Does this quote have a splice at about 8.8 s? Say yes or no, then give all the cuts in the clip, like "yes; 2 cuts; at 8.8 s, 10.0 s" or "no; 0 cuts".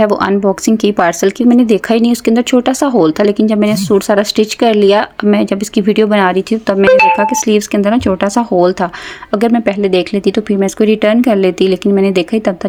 no; 0 cuts